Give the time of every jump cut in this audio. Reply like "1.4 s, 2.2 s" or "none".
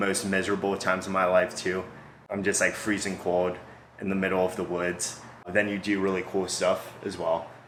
none